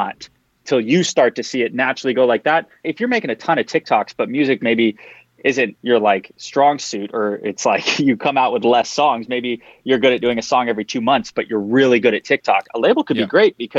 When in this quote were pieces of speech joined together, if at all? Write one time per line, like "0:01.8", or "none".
0:02.9
0:05.8
0:06.4